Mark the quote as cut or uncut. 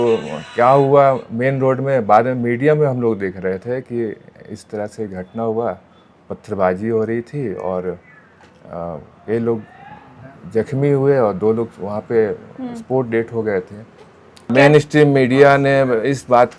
cut